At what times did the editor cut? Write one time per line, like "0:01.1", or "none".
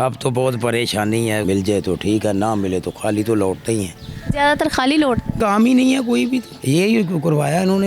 0:01.4
0:05.4
0:06.5